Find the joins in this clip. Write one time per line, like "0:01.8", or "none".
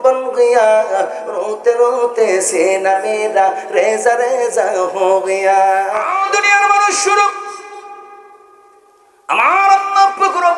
0:06.1